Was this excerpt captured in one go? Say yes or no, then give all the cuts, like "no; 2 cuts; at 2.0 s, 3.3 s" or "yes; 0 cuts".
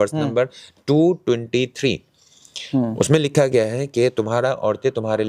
yes; 0 cuts